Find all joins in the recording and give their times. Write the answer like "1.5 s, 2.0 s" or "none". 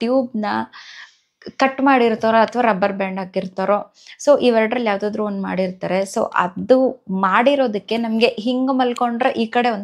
none